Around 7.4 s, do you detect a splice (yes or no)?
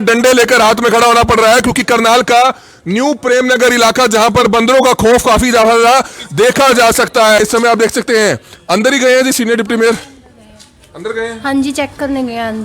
yes